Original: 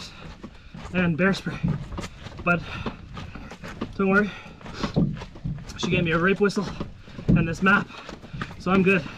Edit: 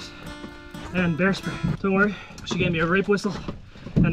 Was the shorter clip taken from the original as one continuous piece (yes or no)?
no